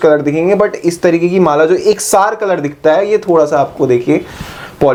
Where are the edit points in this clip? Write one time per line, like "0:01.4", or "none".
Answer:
none